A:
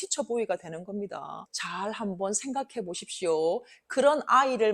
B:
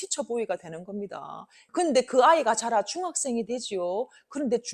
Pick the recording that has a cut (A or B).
A